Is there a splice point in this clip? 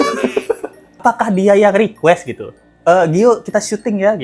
yes; 1 cut; at 1.0 s

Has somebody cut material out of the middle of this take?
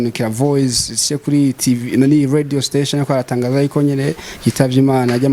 no; 0 cuts

